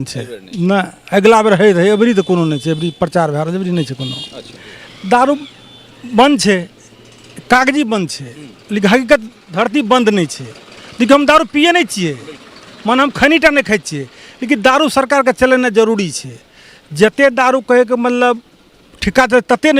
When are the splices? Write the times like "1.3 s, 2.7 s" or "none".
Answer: 4.7 s